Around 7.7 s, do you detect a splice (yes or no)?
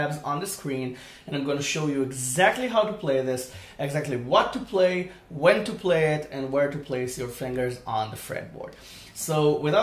no